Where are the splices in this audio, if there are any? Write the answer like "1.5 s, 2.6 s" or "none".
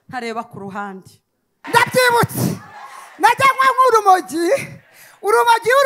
1.7 s